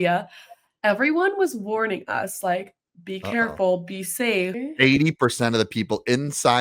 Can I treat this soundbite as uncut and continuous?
no; 1 cut; at 4.6 s

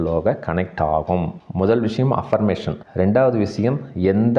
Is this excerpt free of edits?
no; 1 cut; at 1.4 s

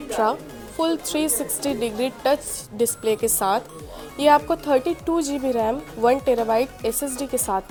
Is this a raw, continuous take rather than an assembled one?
yes; 0 cuts

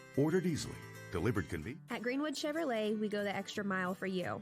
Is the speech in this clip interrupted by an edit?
yes; 1 cut; at 1.6 s

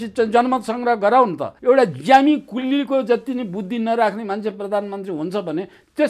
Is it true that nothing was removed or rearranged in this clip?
no; 1 cut; at 1.5 s

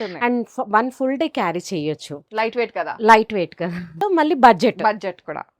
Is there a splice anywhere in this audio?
yes; 1 cut; at 3.9 s

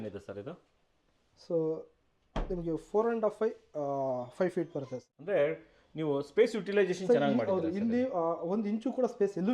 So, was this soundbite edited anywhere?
yes; 1 cut; at 5.1 s

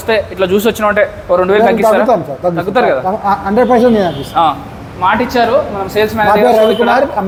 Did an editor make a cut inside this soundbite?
no; 0 cuts

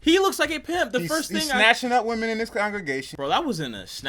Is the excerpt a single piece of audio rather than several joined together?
no; 1 cut; at 3.1 s

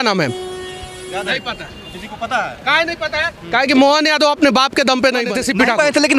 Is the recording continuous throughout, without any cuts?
no; 1 cut; at 5.3 s

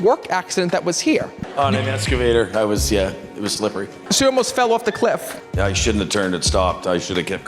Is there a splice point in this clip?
yes; 3 cuts; at 1.4 s, 3.9 s, 5.4 s

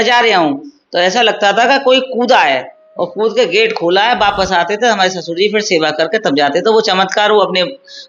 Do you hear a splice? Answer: no; 0 cuts

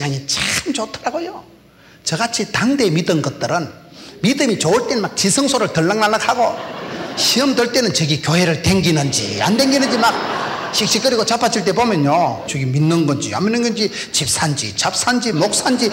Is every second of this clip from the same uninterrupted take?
no; 1 cut; at 12.5 s

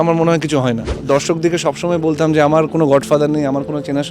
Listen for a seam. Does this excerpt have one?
yes; 1 cut; at 0.9 s

